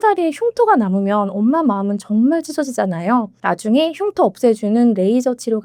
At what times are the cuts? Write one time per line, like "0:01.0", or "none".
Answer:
none